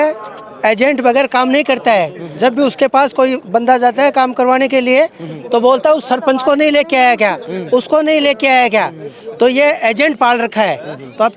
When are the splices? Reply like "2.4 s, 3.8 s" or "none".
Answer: none